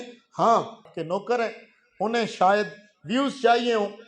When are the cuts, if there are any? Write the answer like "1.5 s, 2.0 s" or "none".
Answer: 0.9 s